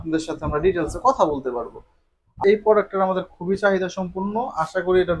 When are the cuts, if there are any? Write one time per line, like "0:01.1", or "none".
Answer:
0:02.4